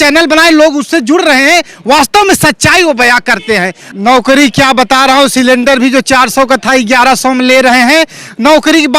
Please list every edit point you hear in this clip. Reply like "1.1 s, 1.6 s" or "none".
3.8 s